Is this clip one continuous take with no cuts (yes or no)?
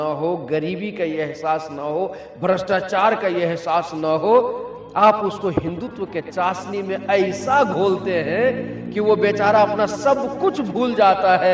yes